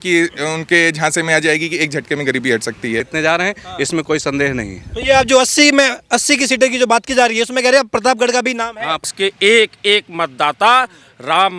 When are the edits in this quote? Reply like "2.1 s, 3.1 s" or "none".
3.1 s, 9.1 s